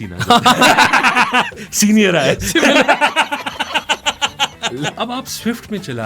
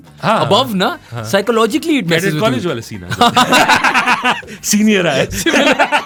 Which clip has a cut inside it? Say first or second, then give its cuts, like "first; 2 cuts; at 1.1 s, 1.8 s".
first; 1 cut; at 4.9 s